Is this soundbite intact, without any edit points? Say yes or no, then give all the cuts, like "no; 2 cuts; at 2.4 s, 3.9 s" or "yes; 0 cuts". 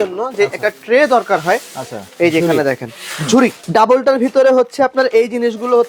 no; 1 cut; at 3.6 s